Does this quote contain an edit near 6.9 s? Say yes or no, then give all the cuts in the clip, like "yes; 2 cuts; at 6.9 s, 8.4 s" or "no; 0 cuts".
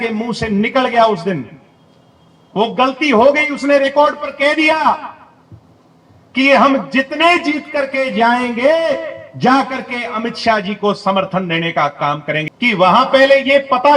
no; 1 cut; at 12.5 s